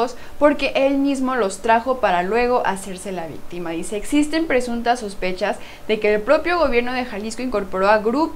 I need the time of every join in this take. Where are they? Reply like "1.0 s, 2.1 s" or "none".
none